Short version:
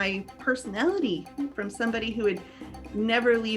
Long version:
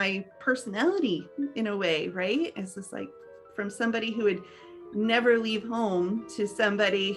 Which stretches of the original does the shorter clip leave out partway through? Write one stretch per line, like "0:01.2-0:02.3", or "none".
0:01.5-0:03.5

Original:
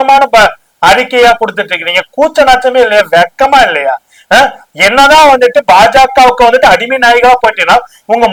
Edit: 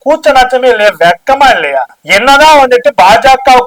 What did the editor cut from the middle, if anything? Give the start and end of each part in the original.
0:04.1-0:04.7

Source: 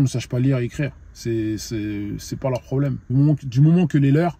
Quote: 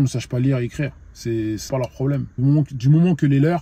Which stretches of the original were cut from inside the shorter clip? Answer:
0:01.6-0:02.3

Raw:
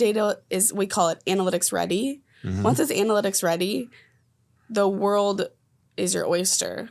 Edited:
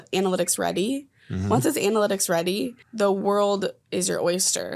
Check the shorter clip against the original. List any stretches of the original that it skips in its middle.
0:03.9-0:04.6
0:05.6-0:05.9

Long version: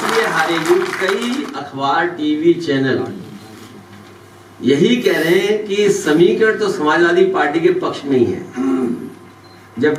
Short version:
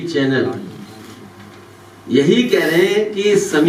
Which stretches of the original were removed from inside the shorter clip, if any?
none

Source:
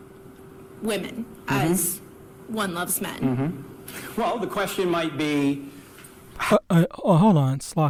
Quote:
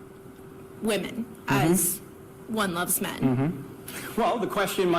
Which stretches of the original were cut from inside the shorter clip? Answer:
none

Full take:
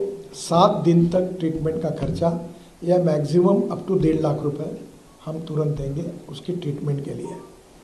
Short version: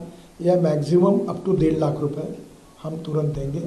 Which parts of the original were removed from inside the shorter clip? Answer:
none

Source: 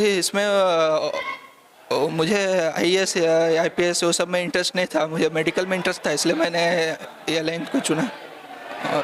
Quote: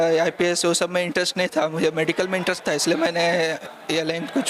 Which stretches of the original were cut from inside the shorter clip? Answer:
none

